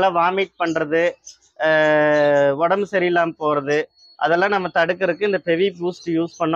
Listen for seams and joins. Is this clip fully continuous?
yes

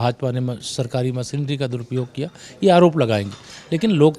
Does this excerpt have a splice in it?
no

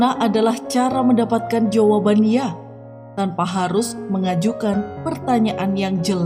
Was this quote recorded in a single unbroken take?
yes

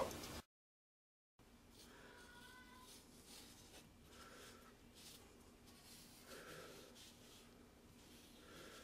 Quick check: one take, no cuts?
yes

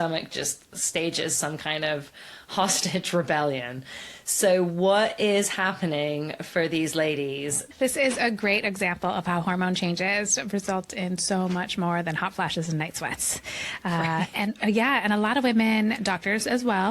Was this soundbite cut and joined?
yes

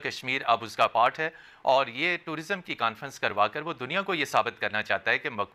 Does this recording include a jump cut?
no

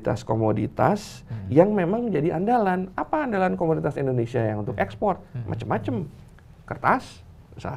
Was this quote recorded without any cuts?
yes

